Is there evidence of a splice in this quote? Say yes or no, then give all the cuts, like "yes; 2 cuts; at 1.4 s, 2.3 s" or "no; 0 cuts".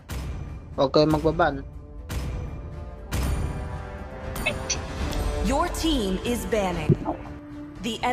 yes; 1 cut; at 7.1 s